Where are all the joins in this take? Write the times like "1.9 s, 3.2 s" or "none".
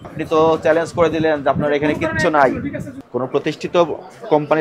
2.9 s